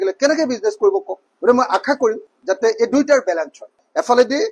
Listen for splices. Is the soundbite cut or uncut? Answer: uncut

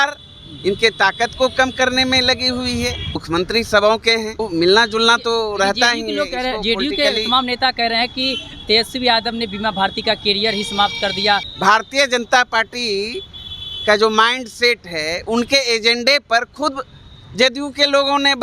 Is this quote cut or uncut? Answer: cut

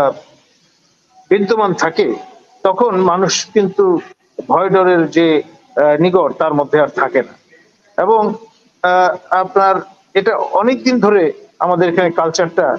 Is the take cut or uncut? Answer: uncut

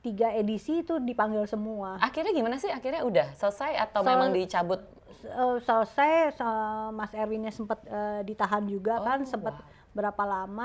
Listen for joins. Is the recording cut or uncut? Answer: uncut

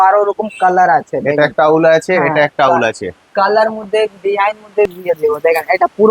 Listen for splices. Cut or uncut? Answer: cut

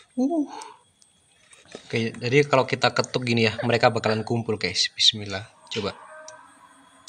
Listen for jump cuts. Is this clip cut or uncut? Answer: uncut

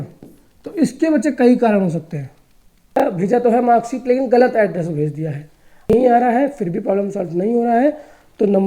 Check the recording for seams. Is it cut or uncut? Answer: cut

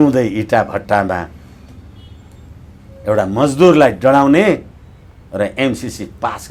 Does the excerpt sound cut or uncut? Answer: uncut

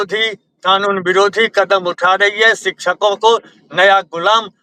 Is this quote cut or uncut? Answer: uncut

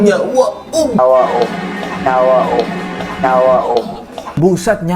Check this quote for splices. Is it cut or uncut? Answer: cut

